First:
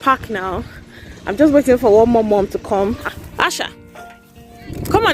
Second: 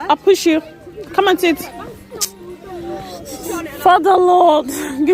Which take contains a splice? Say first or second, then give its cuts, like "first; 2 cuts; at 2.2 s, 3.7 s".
first; 1 cut; at 2.8 s